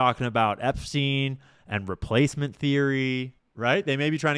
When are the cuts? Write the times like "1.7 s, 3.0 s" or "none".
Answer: 3.4 s